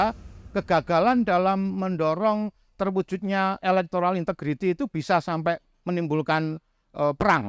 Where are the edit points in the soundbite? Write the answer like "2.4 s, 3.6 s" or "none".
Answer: none